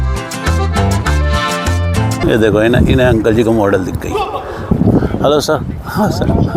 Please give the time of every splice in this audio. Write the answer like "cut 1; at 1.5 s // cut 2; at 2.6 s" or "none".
cut 1; at 2.2 s // cut 2; at 4.7 s